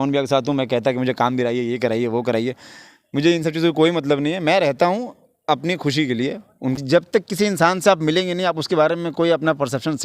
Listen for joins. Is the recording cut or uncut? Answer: cut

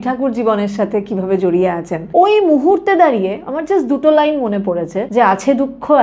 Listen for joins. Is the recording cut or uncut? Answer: cut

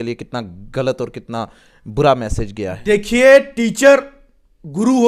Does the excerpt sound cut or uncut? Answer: uncut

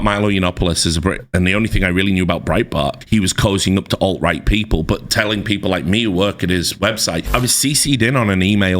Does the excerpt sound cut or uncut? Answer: cut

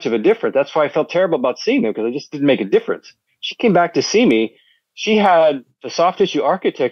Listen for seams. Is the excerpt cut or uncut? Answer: cut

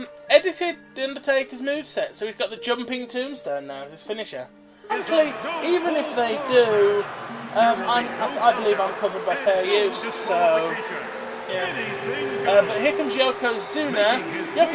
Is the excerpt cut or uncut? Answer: uncut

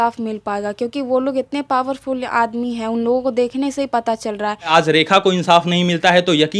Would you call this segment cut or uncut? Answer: cut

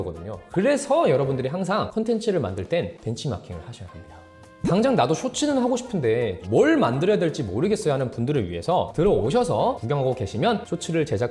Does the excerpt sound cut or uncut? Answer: cut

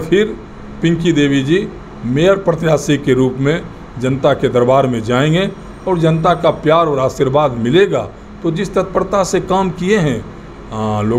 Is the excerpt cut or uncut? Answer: uncut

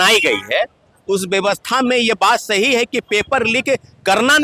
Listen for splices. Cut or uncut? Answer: uncut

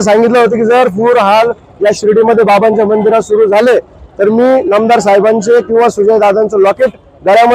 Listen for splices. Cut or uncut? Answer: uncut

